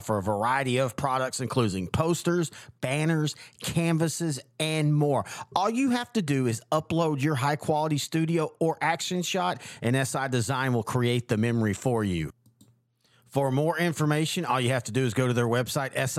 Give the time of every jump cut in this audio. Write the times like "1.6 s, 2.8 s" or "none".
none